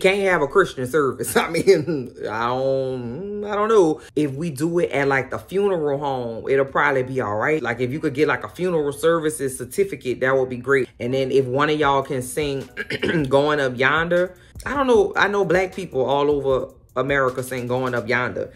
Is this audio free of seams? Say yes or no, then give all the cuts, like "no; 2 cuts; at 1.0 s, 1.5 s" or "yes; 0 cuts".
yes; 0 cuts